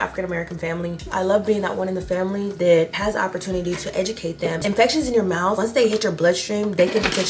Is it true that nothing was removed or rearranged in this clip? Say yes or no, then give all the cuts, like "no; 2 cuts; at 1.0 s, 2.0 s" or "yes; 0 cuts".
no; 2 cuts; at 1.0 s, 4.6 s